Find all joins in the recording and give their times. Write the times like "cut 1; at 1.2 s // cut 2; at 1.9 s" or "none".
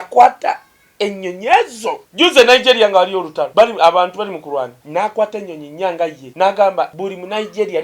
cut 1; at 2.0 s // cut 2; at 3.4 s // cut 3; at 4.8 s // cut 4; at 6.2 s // cut 5; at 6.9 s